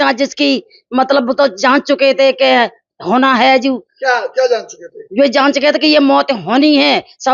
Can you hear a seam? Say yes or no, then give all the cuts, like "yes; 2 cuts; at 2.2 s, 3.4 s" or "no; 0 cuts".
no; 0 cuts